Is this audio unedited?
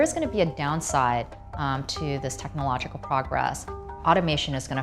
yes; 0 cuts

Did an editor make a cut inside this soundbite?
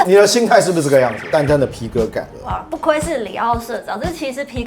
yes; 1 cut; at 1.2 s

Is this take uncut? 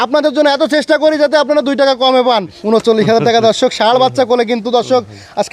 no; 1 cut; at 2.5 s

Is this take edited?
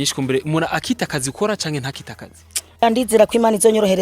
yes; 1 cut; at 2.8 s

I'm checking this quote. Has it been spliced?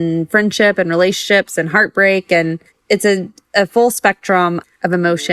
no; 0 cuts

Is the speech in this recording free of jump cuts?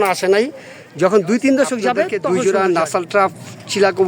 no; 1 cut; at 1.7 s

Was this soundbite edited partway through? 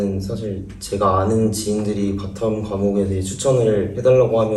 no; 0 cuts

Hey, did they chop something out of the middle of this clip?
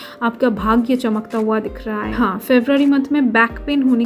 yes; 1 cut; at 2.1 s

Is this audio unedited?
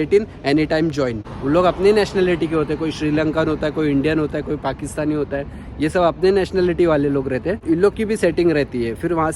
no; 2 cuts; at 1.2 s, 7.6 s

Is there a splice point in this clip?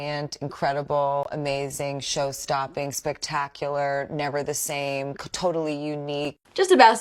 no; 0 cuts

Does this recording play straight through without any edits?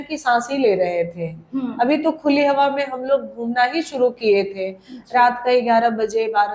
yes; 0 cuts

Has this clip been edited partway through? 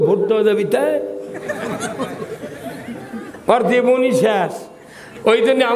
no; 0 cuts

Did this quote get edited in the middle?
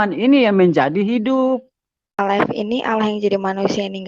yes; 1 cut; at 2.2 s

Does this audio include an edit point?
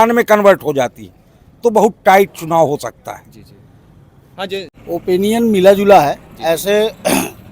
yes; 1 cut; at 4.7 s

